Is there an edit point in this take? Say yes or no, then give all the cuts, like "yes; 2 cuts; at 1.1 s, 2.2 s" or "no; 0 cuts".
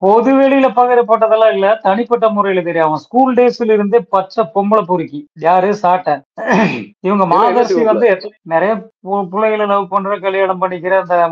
no; 0 cuts